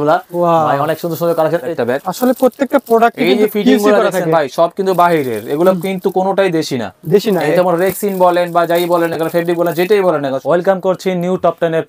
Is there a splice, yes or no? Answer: yes